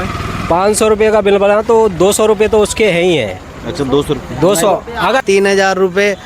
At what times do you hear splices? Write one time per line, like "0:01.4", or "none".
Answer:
0:05.2